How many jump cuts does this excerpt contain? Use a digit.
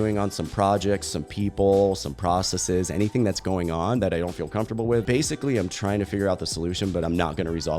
1